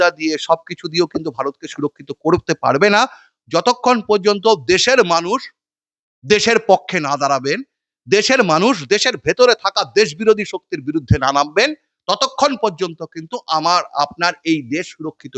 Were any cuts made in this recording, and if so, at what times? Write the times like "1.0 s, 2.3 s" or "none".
none